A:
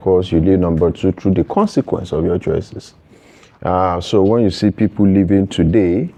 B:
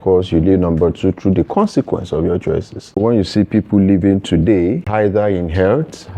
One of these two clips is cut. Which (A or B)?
B